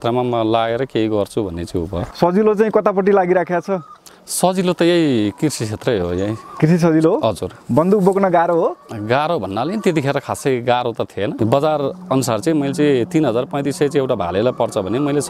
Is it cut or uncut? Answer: cut